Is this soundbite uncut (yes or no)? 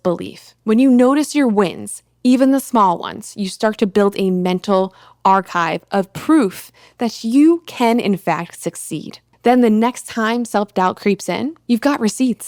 yes